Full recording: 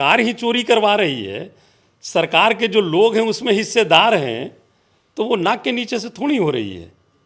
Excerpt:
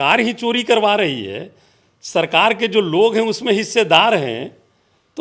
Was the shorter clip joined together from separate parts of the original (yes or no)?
no